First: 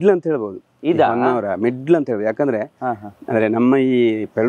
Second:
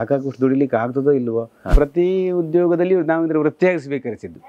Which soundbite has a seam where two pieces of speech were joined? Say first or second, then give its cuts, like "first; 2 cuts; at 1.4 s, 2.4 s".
second; 1 cut; at 1.7 s